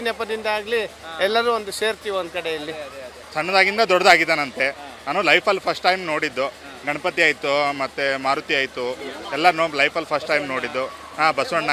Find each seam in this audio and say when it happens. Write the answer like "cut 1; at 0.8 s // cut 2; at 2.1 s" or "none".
cut 1; at 3.2 s